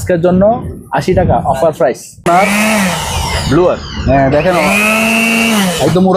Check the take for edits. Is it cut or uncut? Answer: cut